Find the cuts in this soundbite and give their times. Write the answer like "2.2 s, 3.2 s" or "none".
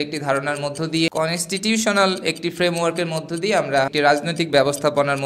1.1 s, 3.9 s